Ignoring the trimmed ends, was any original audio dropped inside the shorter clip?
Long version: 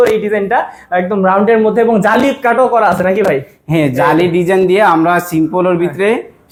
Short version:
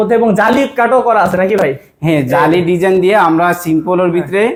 no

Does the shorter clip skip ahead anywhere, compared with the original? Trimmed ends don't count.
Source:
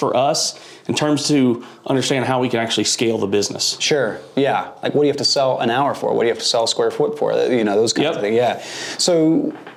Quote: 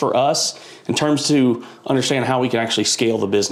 no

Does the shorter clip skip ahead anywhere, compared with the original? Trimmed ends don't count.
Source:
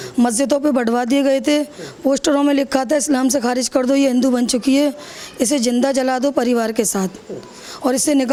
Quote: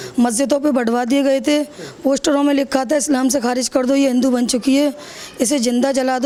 no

